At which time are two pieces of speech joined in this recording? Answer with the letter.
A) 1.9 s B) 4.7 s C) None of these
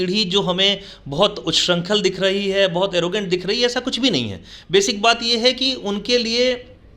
C